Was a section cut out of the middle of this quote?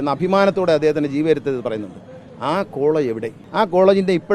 yes; 1 cut; at 3.4 s

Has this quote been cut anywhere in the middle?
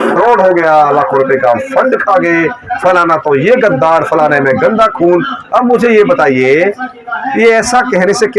no; 0 cuts

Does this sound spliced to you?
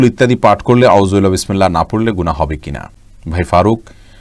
no; 0 cuts

